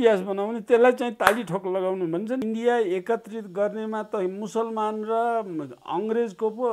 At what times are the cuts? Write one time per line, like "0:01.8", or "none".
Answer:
0:02.4